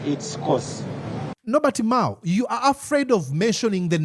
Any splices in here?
no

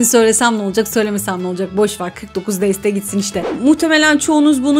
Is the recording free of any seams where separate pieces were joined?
no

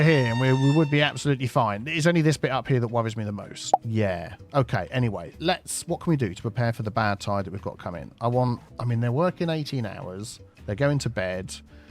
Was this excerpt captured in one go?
no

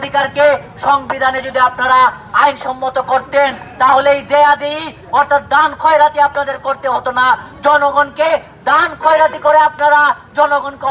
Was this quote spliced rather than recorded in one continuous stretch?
no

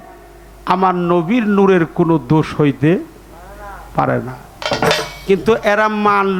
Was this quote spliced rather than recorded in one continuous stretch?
no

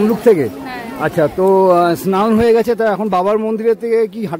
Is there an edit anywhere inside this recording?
no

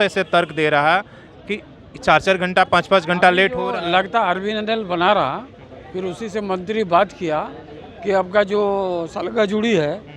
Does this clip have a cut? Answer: no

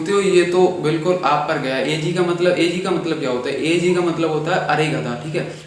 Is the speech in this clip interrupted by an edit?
no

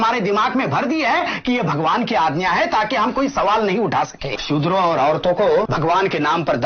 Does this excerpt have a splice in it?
yes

